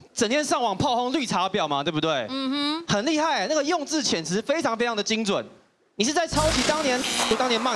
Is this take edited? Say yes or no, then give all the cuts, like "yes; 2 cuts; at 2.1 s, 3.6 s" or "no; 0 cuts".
no; 0 cuts